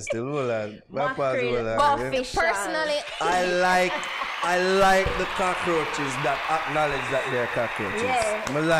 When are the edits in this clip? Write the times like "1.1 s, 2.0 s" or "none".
none